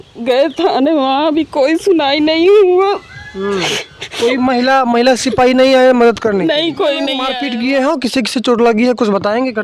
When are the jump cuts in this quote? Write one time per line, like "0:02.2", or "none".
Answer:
0:07.3